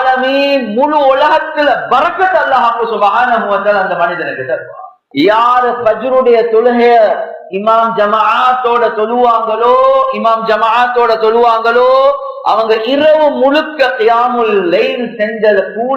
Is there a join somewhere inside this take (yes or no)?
yes